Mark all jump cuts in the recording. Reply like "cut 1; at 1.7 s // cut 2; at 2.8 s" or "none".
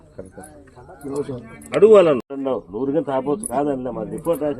cut 1; at 2.3 s